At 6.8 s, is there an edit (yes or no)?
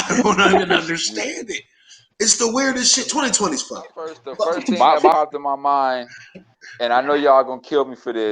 no